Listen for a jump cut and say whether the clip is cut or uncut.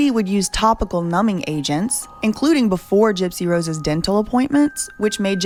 uncut